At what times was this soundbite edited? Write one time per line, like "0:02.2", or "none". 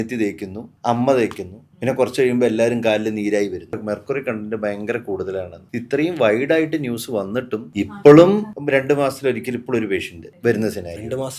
0:03.6